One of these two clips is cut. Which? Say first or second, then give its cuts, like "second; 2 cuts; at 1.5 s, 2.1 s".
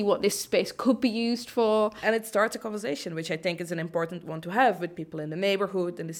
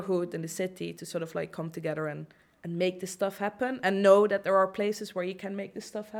first; 1 cut; at 2.0 s